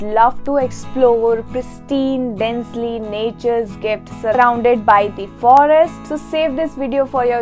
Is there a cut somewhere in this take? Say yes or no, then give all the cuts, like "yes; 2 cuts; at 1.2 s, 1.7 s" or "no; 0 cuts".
no; 0 cuts